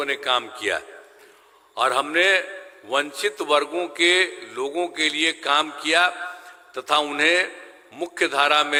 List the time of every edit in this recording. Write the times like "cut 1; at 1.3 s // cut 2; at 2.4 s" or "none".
none